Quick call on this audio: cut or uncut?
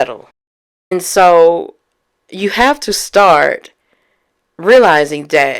cut